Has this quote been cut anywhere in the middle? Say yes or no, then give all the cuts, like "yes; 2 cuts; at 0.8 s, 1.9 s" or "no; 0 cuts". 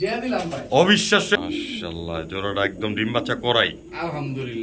yes; 1 cut; at 1.4 s